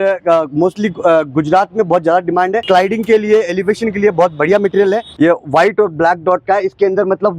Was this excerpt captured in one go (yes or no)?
no